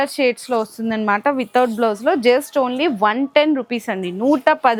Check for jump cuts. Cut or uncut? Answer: uncut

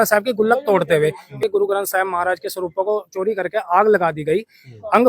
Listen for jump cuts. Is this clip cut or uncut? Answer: cut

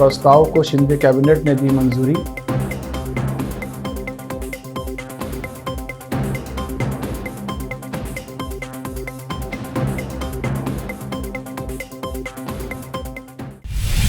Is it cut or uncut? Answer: cut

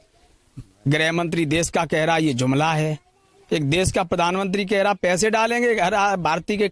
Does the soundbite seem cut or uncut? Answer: uncut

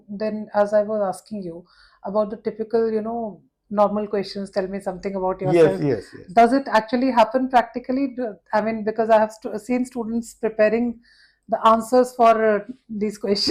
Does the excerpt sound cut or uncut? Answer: uncut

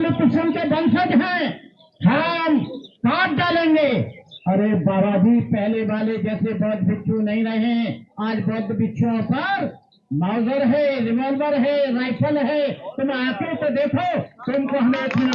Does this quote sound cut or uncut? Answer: uncut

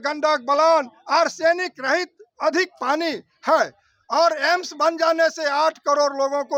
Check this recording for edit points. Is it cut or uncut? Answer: uncut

